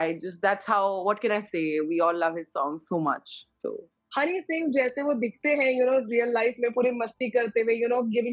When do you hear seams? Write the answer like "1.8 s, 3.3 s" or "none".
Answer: none